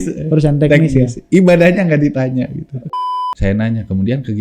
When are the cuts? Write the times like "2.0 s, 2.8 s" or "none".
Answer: 2.9 s